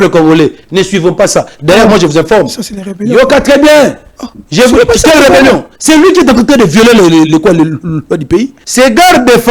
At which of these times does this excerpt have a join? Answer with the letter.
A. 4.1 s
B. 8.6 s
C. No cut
B